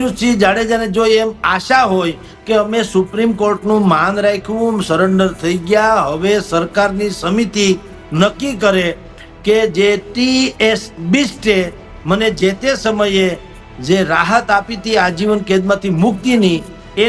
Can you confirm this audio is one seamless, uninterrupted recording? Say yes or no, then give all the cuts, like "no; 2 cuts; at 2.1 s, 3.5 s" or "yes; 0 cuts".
yes; 0 cuts